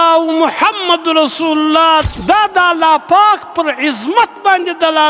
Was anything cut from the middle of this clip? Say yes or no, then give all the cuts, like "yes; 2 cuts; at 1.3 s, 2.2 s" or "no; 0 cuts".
yes; 1 cut; at 2.0 s